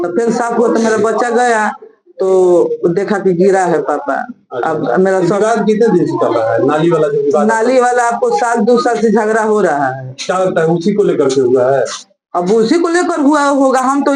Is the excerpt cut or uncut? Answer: uncut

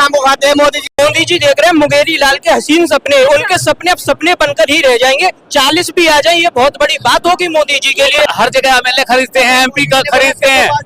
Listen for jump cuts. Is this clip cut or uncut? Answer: cut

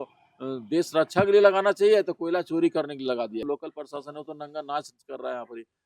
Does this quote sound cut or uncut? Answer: cut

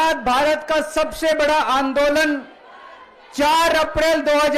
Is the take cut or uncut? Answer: uncut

